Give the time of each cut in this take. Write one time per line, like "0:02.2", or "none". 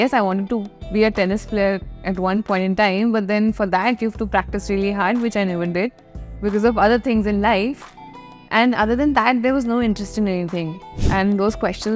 0:11.0